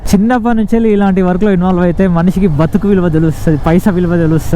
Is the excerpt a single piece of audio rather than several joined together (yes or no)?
yes